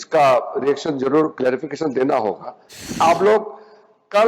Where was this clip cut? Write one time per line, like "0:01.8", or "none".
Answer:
0:03.0